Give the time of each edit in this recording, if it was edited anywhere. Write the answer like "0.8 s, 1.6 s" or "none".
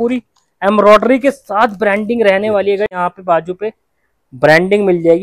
2.9 s